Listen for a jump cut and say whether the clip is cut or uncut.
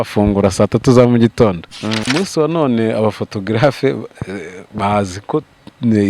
cut